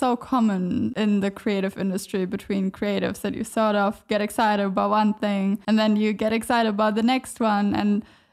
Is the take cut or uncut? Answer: cut